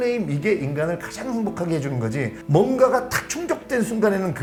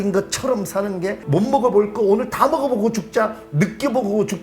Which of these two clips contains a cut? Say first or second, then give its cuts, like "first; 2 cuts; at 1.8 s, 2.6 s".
second; 1 cut; at 1.2 s